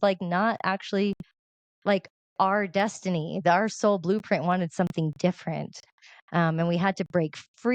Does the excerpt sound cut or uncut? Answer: uncut